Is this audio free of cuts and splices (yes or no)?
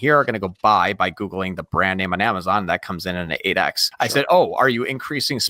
no